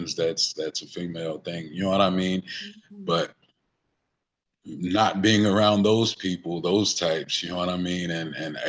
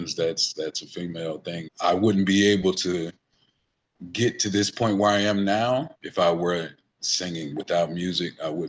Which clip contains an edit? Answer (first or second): second